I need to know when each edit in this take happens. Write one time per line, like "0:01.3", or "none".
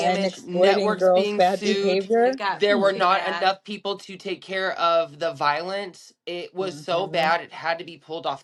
none